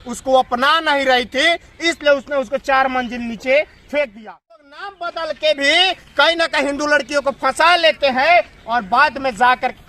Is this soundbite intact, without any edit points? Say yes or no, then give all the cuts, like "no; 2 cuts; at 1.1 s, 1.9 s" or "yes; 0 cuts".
no; 1 cut; at 4.6 s